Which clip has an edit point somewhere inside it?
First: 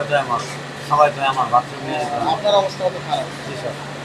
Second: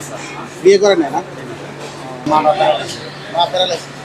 second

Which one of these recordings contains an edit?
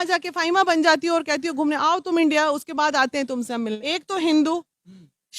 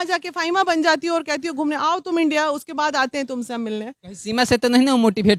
first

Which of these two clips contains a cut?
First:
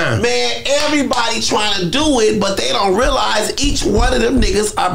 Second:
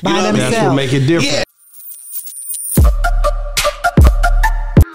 second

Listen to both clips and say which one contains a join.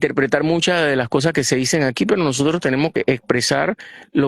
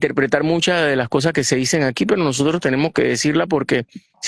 first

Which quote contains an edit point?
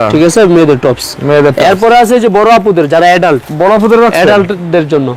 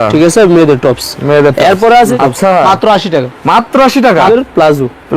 second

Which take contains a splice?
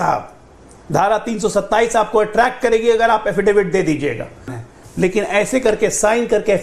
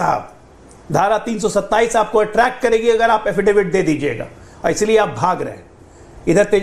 first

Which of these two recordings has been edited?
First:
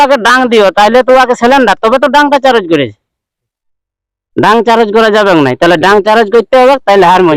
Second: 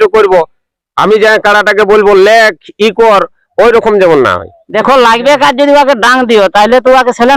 second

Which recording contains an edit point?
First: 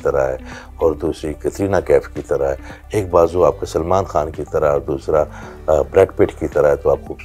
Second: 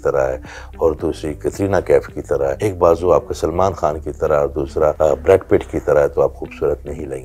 second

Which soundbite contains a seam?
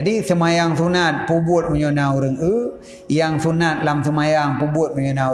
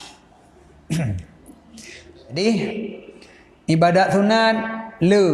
second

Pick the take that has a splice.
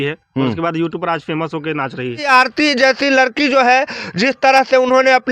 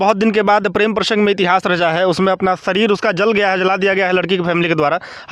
first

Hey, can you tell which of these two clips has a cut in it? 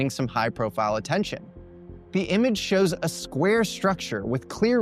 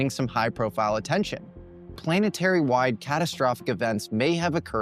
second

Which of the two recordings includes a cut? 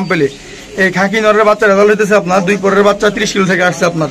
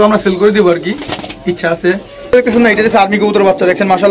second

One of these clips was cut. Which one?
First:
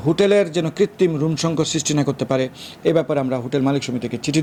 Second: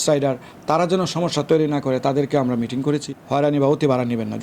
second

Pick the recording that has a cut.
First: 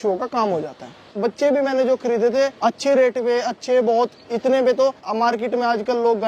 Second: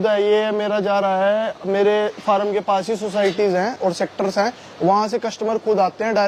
first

